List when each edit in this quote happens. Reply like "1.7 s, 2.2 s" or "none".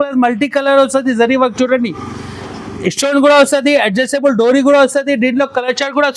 none

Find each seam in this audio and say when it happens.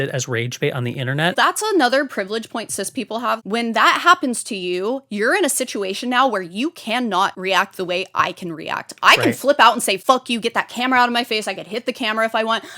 1.4 s, 3.4 s, 7.4 s, 10.0 s

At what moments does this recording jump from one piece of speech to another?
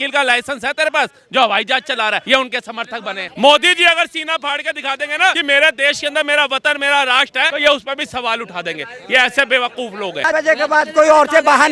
2.2 s, 3.2 s, 5.4 s, 7.5 s, 10.3 s

